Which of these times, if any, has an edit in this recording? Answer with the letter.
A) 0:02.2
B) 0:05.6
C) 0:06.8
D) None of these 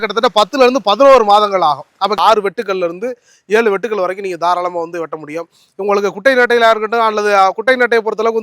A